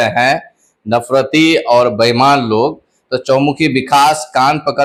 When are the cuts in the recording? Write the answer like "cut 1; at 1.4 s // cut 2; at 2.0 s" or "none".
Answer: none